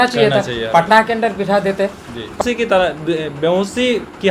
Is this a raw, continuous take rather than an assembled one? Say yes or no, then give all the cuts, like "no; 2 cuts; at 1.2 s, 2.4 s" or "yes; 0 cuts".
no; 1 cut; at 2.4 s